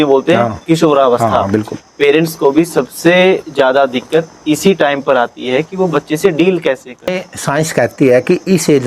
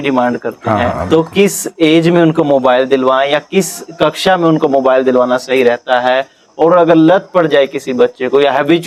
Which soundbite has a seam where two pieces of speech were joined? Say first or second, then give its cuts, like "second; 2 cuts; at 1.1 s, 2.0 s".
first; 1 cut; at 7.3 s